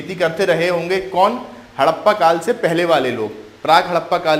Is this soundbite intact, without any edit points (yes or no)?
yes